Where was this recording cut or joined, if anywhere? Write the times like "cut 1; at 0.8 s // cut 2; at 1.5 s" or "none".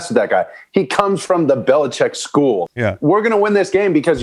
cut 1; at 2.6 s

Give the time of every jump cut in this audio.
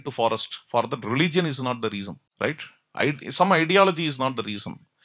cut 1; at 2.2 s

